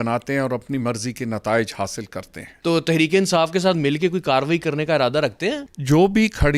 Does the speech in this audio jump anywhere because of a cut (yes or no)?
yes